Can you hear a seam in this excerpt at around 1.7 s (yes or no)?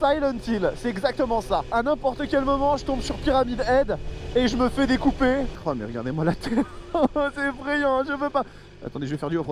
yes